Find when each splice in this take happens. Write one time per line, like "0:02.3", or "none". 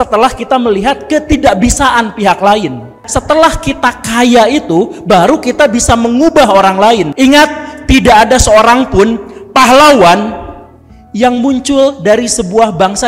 0:03.0
0:07.1